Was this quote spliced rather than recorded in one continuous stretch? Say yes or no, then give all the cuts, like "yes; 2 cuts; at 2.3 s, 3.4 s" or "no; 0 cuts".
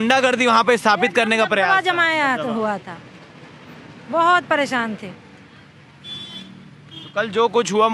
no; 0 cuts